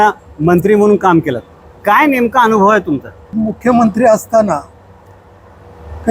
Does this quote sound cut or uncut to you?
cut